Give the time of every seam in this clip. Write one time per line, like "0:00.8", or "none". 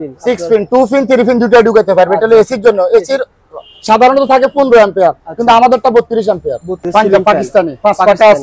0:06.9